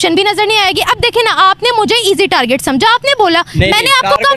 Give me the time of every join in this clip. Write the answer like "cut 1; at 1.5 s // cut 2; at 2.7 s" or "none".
none